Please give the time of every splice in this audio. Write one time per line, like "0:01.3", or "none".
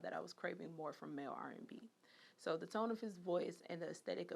none